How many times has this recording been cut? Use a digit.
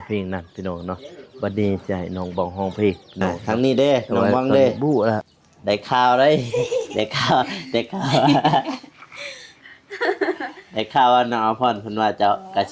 1